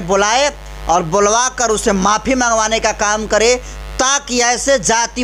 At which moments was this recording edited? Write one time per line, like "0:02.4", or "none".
none